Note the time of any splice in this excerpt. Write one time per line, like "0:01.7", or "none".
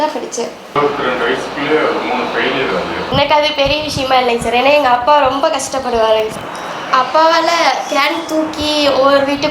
0:00.7
0:06.8